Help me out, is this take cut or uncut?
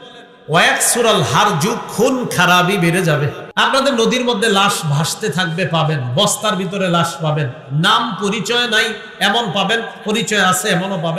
cut